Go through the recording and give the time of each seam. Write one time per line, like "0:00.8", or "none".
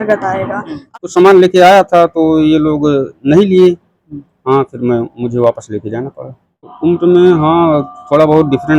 0:00.9
0:06.7